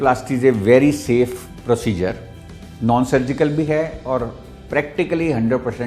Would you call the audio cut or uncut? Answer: uncut